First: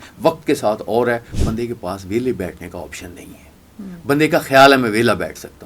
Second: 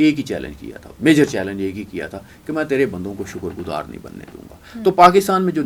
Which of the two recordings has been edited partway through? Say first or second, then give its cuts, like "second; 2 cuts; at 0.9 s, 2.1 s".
first; 1 cut; at 1.3 s